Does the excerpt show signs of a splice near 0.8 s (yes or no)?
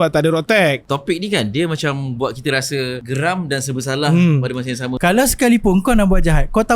yes